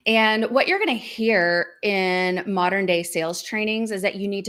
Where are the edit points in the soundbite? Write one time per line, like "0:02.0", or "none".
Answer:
none